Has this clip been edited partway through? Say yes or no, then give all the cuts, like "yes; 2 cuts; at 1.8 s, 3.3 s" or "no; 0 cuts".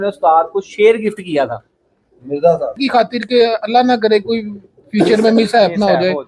yes; 1 cut; at 2.8 s